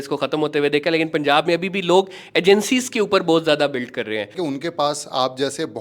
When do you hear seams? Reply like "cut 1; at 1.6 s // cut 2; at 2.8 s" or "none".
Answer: cut 1; at 4.3 s